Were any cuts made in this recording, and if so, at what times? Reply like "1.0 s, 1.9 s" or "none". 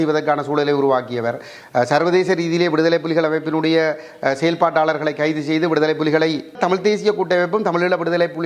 6.6 s